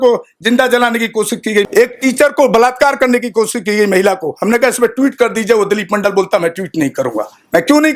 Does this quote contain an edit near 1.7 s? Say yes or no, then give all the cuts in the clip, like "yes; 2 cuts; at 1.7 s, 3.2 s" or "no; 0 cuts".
yes; 1 cut; at 1.7 s